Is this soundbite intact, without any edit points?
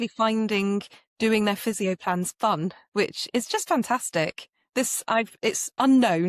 yes; 0 cuts

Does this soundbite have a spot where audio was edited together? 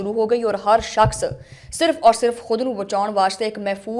no; 0 cuts

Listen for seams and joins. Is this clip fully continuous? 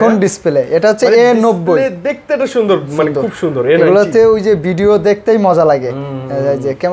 yes; 0 cuts

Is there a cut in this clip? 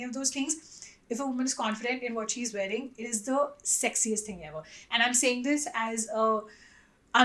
no; 0 cuts

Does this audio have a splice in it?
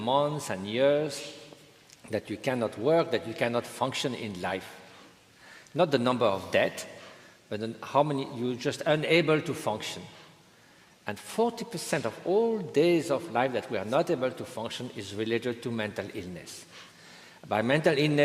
yes; 1 cut; at 6.3 s

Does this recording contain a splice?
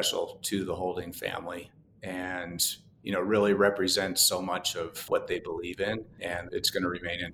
yes; 2 cuts; at 5.0 s, 6.3 s

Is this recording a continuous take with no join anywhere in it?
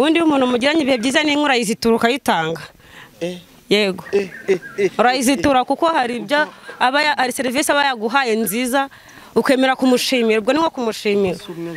yes; 0 cuts

